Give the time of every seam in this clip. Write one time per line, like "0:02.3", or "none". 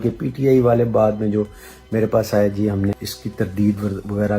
0:03.1